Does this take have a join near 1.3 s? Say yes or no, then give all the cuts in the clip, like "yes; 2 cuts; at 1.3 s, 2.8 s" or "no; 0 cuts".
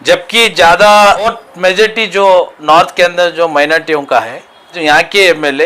yes; 2 cuts; at 1.3 s, 4.8 s